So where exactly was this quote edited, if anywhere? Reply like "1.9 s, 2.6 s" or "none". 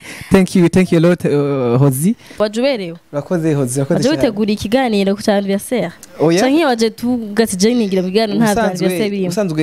2.3 s